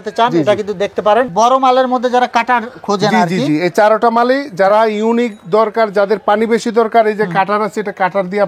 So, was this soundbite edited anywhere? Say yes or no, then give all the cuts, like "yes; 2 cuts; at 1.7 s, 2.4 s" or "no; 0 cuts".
yes; 1 cut; at 1.3 s